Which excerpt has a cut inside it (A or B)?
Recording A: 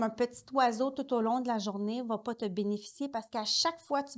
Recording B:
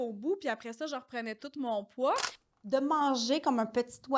B